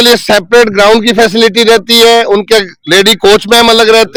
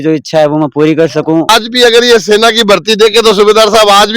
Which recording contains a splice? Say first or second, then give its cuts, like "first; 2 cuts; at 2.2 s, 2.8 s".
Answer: second; 1 cut; at 1.5 s